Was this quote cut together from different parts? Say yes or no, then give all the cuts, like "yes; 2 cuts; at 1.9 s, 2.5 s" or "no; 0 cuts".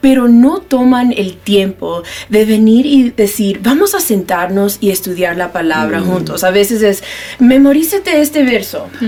no; 0 cuts